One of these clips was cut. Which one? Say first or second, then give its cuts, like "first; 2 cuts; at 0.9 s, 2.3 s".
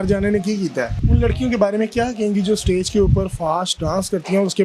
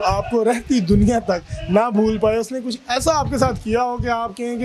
first; 1 cut; at 1.0 s